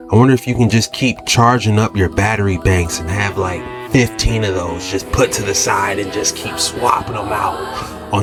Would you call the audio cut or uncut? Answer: uncut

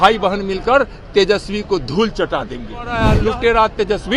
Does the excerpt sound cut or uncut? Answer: cut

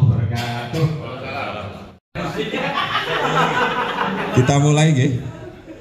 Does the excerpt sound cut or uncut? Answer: cut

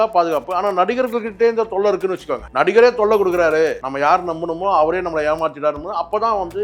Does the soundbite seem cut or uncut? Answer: cut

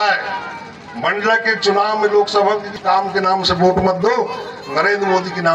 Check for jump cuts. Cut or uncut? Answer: cut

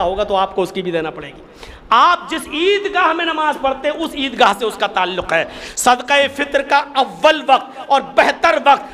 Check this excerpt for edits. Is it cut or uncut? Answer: cut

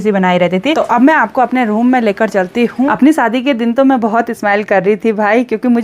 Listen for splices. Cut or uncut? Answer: cut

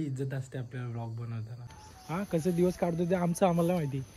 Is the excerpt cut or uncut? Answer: cut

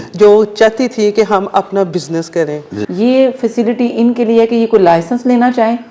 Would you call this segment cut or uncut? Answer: cut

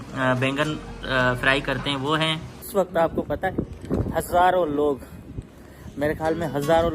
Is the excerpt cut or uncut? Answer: cut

